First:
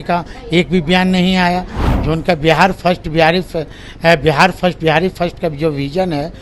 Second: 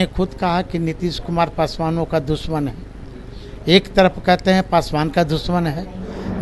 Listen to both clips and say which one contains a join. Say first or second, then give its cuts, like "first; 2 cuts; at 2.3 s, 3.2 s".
first; 1 cut; at 1.8 s